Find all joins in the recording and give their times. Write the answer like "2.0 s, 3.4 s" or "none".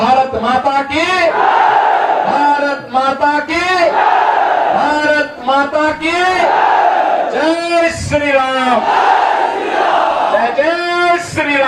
none